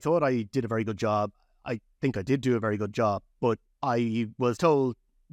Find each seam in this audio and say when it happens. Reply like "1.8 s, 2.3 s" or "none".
3.7 s